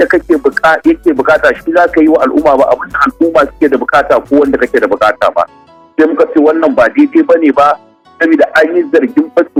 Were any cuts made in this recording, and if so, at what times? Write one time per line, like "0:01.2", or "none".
none